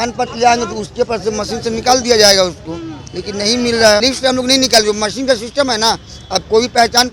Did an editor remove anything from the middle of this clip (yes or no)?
yes